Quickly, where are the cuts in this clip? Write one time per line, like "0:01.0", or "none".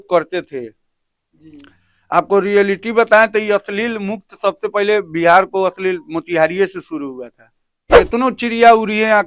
0:08.0